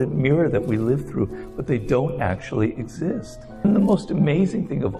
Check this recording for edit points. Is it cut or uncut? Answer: cut